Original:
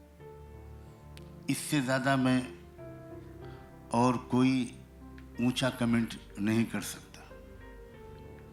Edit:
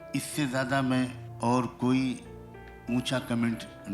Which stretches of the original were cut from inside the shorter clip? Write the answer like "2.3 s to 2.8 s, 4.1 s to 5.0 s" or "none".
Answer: 2.6 s to 3.7 s